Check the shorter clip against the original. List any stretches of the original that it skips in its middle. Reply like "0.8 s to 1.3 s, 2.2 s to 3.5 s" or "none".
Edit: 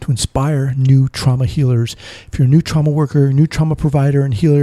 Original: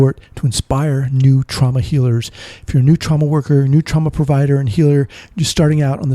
none